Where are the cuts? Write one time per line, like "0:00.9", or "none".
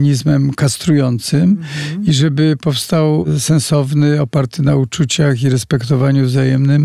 0:03.2